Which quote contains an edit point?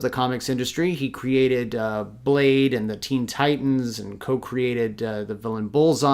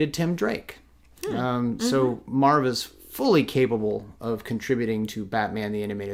first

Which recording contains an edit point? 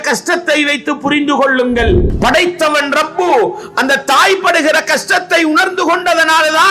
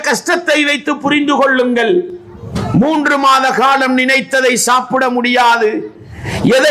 first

